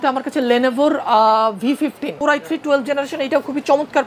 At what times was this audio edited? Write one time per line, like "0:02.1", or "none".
0:02.1